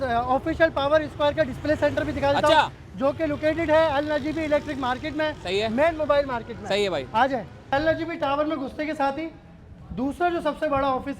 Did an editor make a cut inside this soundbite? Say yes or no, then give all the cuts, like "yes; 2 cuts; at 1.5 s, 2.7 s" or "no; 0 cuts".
yes; 1 cut; at 7.7 s